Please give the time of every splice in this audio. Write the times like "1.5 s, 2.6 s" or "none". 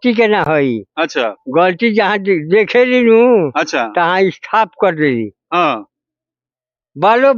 none